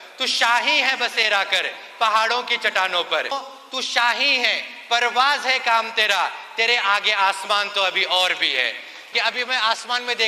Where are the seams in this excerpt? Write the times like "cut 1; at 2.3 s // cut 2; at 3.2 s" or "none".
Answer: cut 1; at 3.3 s // cut 2; at 8.9 s